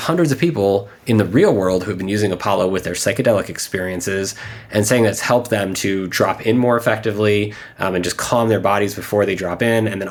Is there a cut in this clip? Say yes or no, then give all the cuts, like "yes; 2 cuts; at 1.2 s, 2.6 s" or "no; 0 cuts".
no; 0 cuts